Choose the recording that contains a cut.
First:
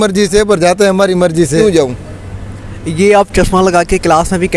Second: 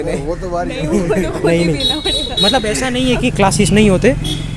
first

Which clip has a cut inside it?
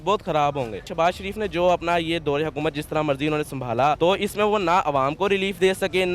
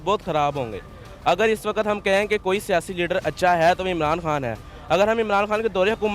first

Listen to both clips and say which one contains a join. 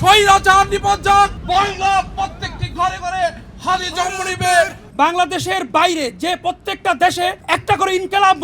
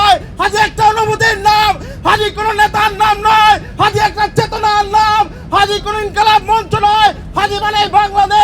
first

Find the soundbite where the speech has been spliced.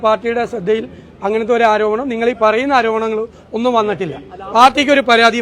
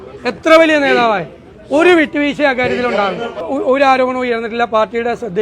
second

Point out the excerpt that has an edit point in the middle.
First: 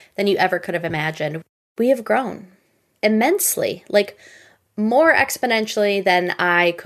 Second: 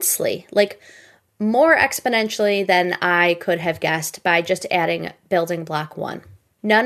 first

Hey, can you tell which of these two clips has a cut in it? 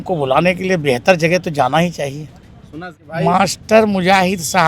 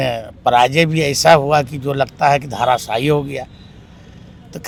first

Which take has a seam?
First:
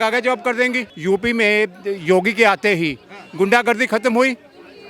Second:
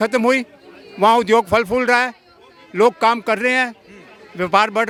first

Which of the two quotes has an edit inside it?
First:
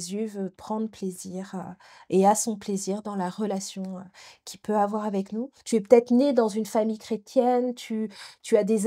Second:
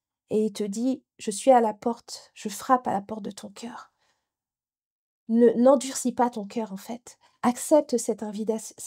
first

